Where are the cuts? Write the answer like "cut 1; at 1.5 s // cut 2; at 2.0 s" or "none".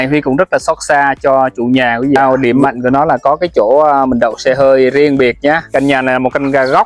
cut 1; at 2.2 s // cut 2; at 5.6 s